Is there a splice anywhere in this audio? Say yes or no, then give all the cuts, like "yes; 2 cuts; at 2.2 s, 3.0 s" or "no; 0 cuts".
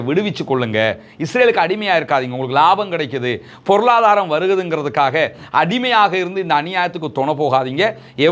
no; 0 cuts